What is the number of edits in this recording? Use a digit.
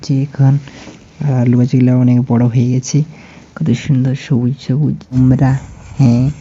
1